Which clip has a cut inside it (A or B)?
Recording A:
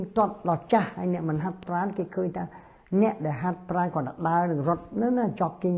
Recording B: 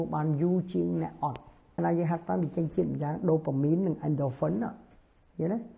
B